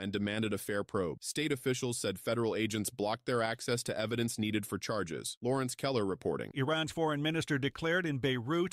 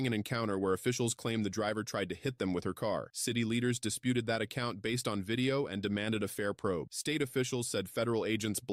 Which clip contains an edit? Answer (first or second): first